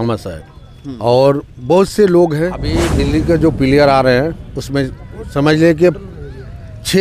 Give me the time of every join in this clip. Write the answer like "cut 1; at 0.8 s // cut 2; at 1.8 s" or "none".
cut 1; at 2.9 s